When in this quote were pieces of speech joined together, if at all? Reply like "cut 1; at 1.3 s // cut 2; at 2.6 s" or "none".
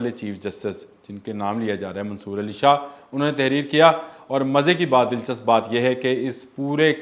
none